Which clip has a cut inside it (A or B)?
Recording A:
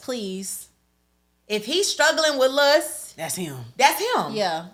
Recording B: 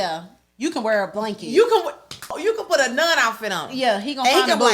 B